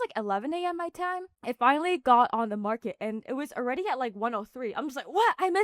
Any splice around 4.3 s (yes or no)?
no